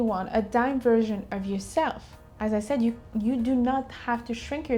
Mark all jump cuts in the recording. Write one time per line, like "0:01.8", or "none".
none